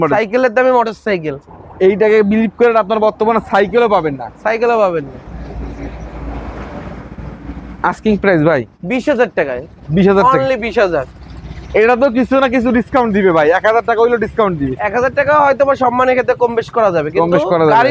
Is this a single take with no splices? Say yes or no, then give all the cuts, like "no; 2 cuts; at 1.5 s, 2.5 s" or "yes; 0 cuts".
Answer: yes; 0 cuts